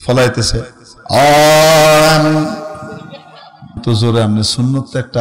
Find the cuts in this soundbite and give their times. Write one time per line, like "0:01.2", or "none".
0:03.8